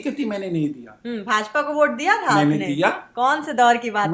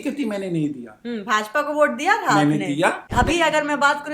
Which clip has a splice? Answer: second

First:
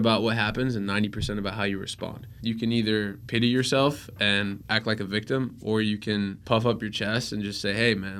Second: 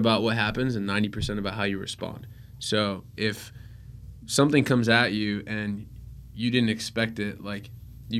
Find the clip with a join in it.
first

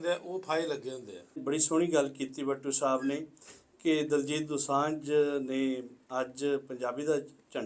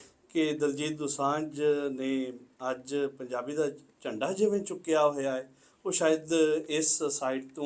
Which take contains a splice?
first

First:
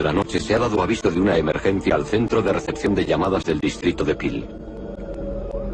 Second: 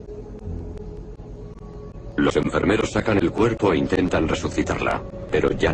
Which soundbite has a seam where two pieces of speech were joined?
second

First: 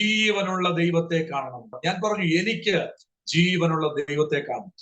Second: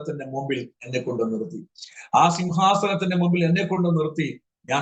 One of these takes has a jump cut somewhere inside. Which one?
first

